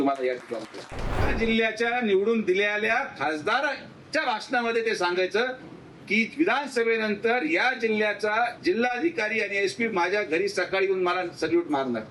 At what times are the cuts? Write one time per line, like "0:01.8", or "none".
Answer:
0:01.3